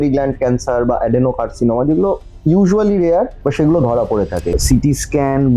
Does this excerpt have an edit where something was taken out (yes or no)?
yes